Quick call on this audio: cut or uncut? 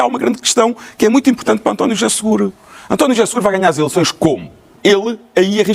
cut